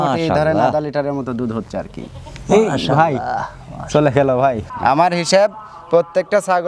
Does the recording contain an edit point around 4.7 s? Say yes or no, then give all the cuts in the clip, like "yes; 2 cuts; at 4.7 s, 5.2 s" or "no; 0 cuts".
yes; 1 cut; at 4.7 s